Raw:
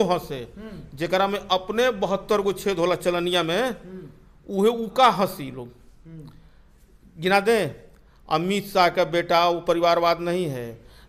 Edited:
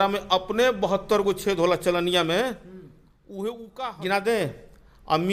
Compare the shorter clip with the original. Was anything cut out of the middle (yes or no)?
yes